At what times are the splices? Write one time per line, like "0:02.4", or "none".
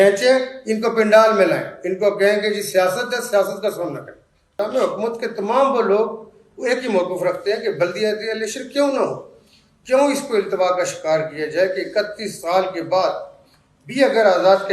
0:04.5